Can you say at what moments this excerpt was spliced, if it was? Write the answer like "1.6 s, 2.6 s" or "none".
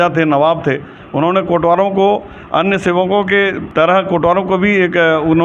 3.6 s